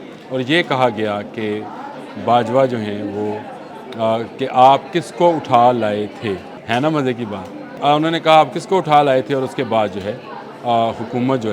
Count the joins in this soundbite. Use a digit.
2